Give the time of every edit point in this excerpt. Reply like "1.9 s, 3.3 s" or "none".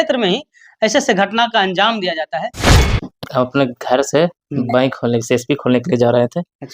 2.7 s